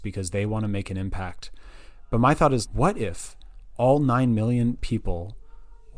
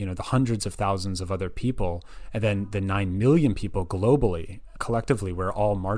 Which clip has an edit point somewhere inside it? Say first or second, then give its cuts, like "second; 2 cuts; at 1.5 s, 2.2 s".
second; 1 cut; at 4.7 s